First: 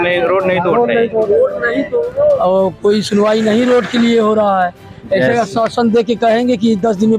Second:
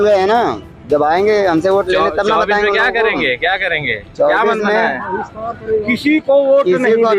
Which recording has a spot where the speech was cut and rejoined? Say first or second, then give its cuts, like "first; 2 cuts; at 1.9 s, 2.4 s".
first; 1 cut; at 2.0 s